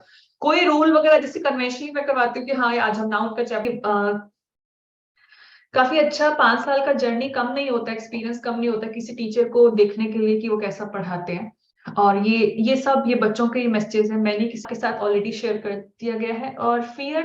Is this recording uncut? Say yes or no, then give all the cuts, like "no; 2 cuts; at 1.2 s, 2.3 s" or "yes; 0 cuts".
no; 2 cuts; at 3.7 s, 14.7 s